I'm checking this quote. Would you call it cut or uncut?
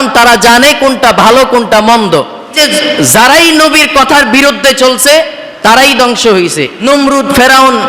cut